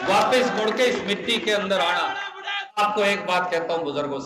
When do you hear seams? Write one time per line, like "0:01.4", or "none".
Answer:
0:02.8

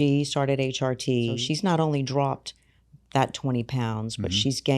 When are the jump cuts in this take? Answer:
0:01.4

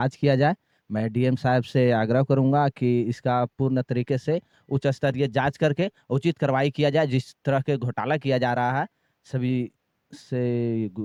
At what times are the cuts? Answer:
none

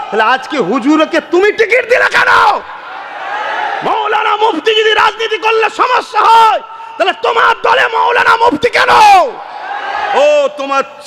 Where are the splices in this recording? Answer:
0:03.5

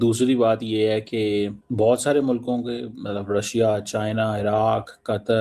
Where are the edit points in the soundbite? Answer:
0:01.6

